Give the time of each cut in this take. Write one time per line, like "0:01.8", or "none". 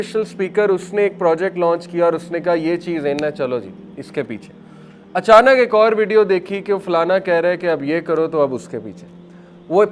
none